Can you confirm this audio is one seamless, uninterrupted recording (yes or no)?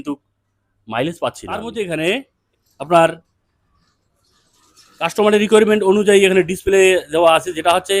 no